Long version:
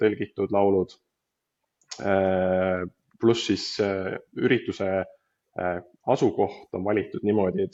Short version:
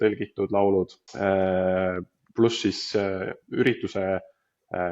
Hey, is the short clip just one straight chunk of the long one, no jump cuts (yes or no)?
no